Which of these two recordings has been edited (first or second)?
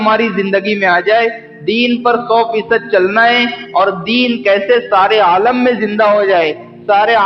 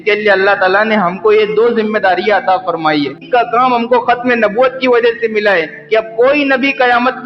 second